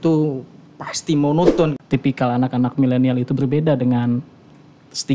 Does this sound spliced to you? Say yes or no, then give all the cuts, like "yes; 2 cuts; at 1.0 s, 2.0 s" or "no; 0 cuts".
yes; 1 cut; at 1.8 s